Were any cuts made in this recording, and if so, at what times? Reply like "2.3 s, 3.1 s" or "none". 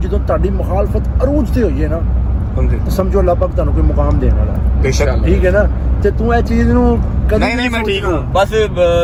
none